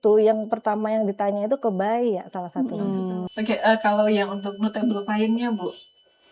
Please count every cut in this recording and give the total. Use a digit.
1